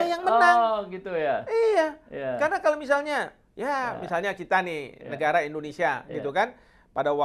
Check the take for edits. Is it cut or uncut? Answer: uncut